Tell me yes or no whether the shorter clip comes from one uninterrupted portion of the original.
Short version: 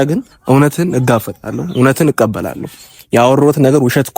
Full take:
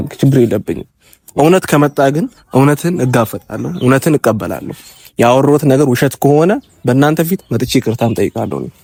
yes